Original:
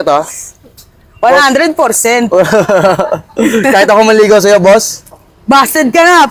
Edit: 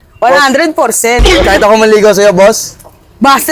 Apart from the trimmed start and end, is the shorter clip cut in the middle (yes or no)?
yes